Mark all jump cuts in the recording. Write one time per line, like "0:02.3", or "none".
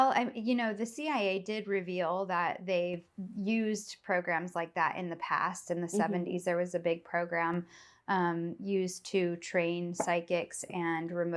none